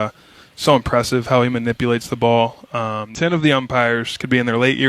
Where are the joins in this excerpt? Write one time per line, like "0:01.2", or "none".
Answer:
0:03.0